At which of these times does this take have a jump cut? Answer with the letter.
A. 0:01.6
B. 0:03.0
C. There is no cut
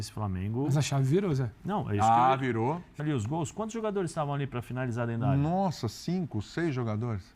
B